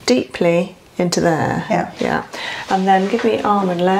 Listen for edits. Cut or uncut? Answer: uncut